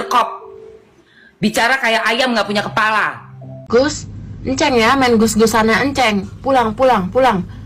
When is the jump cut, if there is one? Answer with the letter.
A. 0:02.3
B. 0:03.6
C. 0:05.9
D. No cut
B